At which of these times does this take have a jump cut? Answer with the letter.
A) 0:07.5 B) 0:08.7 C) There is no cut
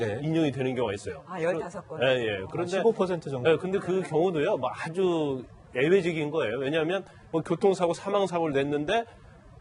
C